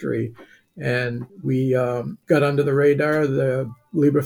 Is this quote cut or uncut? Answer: cut